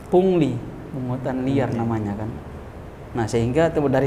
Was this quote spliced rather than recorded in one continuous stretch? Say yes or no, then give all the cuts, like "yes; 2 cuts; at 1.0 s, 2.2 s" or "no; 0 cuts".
no; 0 cuts